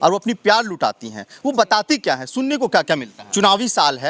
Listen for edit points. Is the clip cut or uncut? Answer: cut